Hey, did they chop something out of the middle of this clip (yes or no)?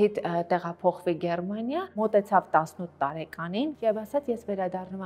yes